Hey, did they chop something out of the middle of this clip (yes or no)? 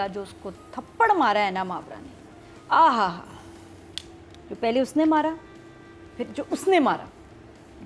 no